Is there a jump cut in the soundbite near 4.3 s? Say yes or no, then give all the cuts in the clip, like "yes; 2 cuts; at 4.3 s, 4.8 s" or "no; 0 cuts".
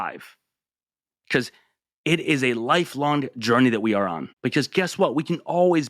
yes; 1 cut; at 4.3 s